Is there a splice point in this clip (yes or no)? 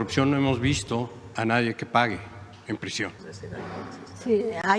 yes